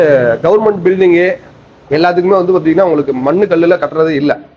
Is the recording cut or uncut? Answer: uncut